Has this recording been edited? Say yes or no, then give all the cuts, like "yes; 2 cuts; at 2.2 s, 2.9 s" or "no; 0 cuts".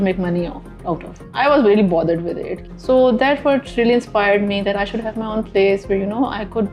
yes; 2 cuts; at 1.2 s, 2.6 s